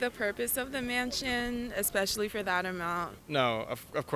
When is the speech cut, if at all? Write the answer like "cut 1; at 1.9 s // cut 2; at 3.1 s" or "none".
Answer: none

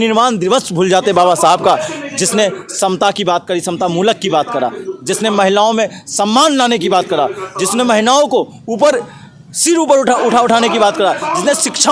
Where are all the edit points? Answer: none

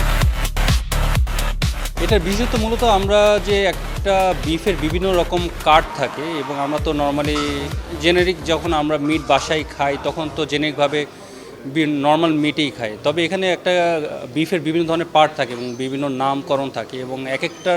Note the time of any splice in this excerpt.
cut 1; at 1.7 s

